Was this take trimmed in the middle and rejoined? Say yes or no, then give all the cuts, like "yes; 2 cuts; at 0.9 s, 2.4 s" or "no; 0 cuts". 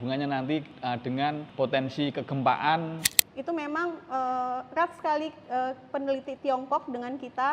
yes; 2 cuts; at 1.0 s, 3.0 s